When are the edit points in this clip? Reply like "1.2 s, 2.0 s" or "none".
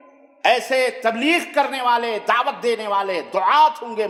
none